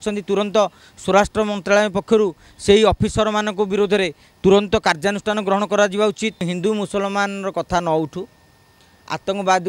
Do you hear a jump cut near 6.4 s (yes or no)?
yes